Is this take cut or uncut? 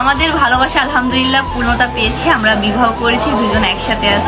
uncut